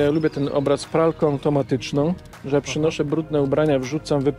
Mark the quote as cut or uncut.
uncut